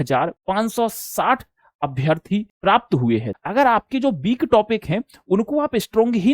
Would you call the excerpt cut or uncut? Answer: cut